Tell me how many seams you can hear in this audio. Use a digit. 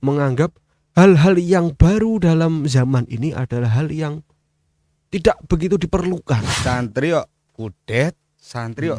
1